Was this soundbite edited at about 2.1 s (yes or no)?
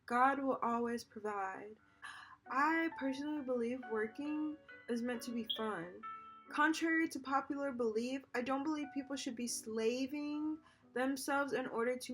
yes